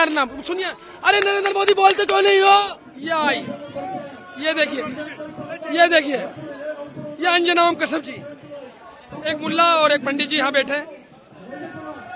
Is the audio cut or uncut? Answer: cut